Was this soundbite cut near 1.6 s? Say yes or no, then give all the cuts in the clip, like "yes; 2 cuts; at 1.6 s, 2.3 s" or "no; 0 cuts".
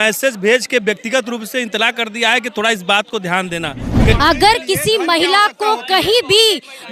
no; 1 cut; at 4.1 s